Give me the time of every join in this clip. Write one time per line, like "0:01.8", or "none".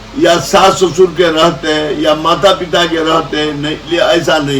none